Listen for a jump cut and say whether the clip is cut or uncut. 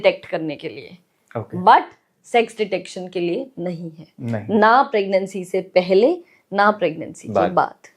uncut